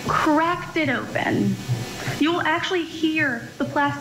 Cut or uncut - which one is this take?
uncut